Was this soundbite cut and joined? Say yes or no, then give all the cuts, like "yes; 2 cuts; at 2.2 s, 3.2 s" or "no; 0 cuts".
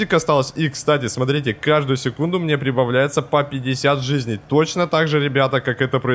no; 0 cuts